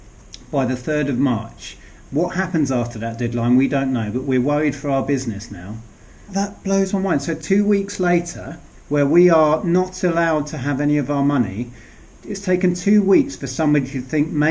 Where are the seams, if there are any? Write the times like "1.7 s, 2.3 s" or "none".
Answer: 6.3 s